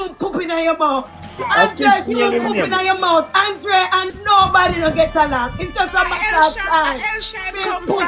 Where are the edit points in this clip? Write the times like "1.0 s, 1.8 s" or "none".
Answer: 1.5 s